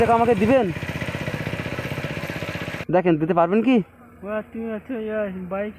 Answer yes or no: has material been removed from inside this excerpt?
yes